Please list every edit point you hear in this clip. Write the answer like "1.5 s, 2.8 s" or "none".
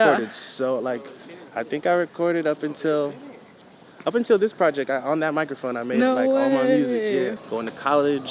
7.4 s